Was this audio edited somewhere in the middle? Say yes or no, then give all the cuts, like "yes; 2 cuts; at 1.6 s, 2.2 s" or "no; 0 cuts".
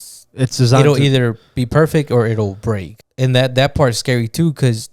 yes; 1 cut; at 2.9 s